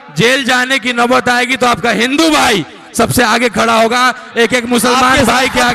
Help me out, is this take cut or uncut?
uncut